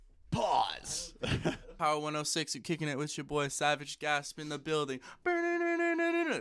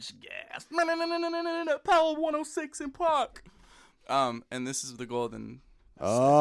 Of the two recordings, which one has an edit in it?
first; 1 cut; at 1.7 s

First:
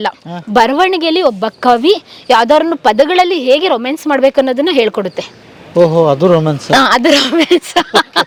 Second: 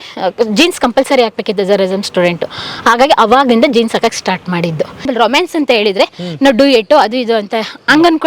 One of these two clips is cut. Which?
second; 1 cut; at 5.1 s

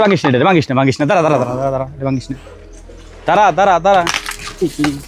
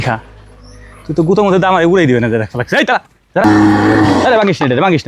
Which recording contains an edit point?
second; 1 cut; at 3.4 s

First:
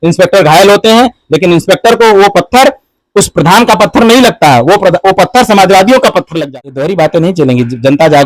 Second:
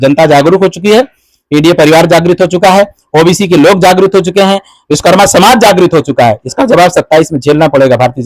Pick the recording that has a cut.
first; 1 cut; at 6.4 s

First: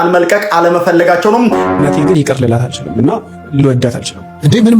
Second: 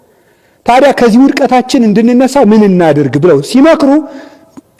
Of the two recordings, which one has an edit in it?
first; 1 cut; at 1.6 s

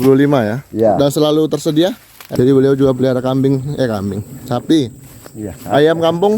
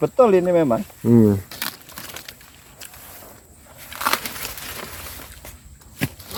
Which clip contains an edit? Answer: first; 1 cut; at 2.1 s

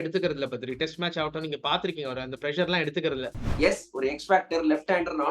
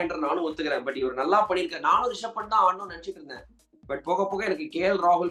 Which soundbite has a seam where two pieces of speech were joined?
first; 1 cut; at 3.5 s

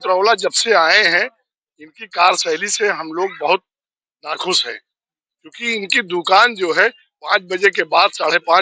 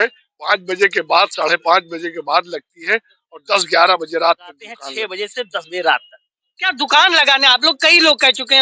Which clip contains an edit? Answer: second; 1 cut; at 4.9 s

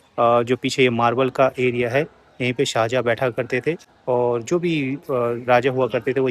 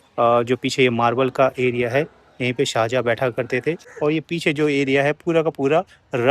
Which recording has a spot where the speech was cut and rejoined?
second; 1 cut; at 3.9 s

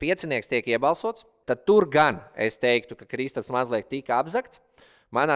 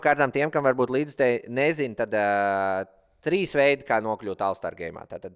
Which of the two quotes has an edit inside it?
first; 1 cut; at 1.3 s

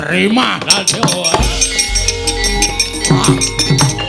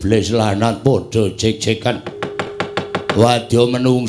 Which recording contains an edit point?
second; 1 cut; at 2.5 s

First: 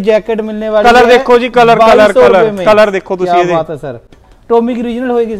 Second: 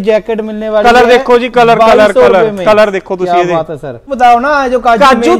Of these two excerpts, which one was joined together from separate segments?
second; 1 cut; at 4.0 s

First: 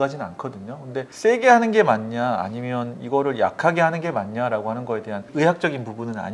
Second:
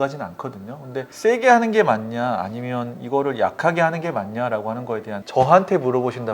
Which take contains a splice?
second; 1 cut; at 5.2 s

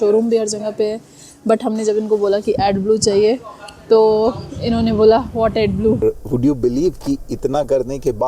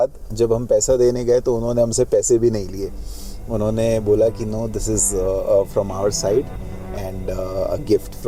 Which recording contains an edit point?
first; 1 cut; at 6.0 s

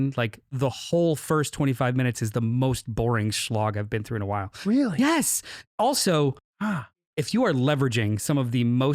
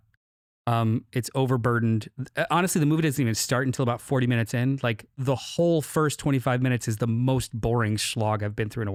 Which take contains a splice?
first; 1 cut; at 7.1 s

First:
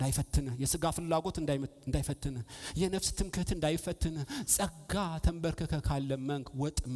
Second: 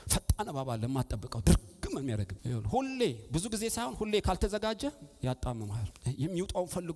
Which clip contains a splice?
second; 2 cuts; at 2.3 s, 5.9 s

